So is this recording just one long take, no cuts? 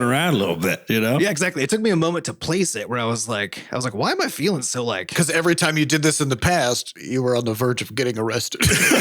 no; 2 cuts; at 1.2 s, 5.1 s

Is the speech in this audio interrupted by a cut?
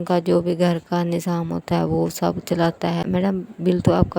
yes; 1 cut; at 3.0 s

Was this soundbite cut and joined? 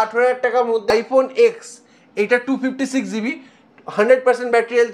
yes; 1 cut; at 0.9 s

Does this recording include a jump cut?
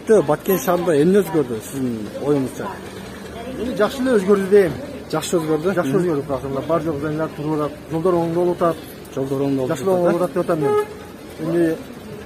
no; 0 cuts

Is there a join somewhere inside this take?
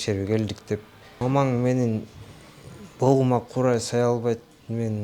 yes; 1 cut; at 1.0 s

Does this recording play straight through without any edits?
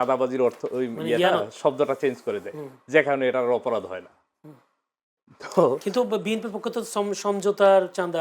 yes; 0 cuts

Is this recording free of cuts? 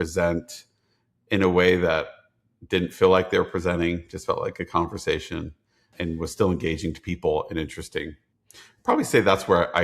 no; 1 cut; at 5.9 s

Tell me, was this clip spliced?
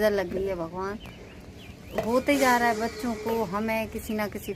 no; 0 cuts

